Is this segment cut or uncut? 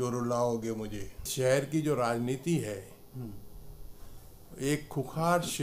cut